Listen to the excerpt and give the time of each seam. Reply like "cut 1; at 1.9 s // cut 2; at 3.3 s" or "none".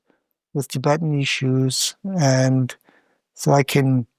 none